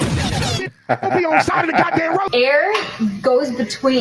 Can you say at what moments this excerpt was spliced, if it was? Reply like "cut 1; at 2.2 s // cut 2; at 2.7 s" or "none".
cut 1; at 2.3 s